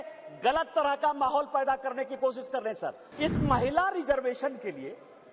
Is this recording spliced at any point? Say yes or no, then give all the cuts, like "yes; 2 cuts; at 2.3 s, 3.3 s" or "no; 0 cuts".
yes; 1 cut; at 3.0 s